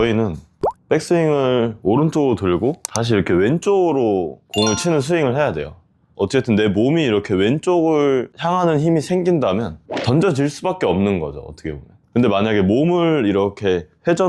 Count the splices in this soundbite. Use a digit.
1